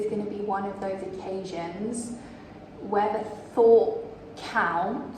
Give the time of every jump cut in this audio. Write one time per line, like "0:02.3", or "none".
none